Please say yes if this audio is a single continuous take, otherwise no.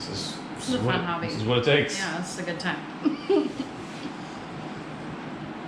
yes